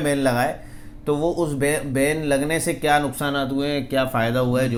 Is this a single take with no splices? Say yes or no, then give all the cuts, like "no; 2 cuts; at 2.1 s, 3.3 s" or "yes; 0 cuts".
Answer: yes; 0 cuts